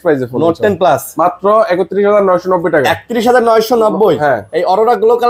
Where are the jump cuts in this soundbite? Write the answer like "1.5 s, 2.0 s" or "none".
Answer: none

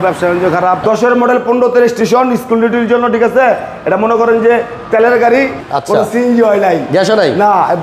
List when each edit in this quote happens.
0.8 s, 5.6 s

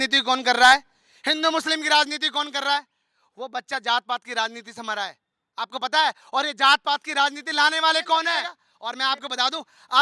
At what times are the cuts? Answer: 8.6 s

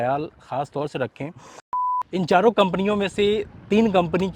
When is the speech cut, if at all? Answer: 2.0 s

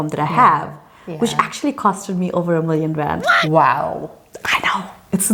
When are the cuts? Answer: none

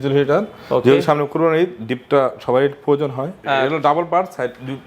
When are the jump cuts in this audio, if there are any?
3.3 s

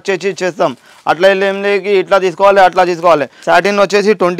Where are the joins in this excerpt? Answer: 3.3 s

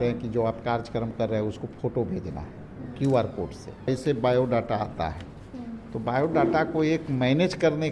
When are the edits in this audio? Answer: 3.9 s

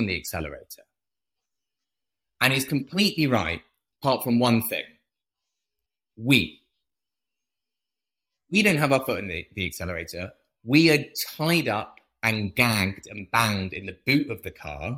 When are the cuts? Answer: 5.8 s

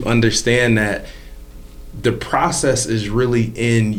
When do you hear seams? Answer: none

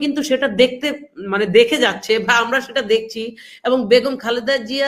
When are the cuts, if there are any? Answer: none

